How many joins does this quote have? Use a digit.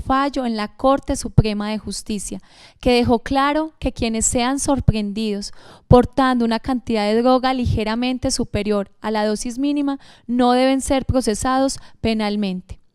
0